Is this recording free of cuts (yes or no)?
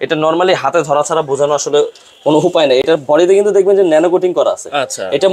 yes